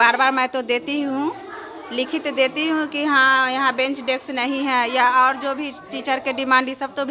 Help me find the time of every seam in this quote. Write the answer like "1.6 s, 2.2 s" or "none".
none